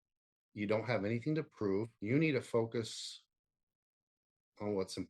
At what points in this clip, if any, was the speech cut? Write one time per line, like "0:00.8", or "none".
0:01.9